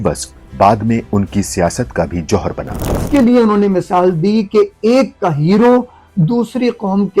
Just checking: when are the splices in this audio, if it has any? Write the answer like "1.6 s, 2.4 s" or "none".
3.0 s